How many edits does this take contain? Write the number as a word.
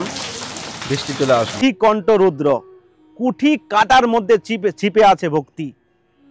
one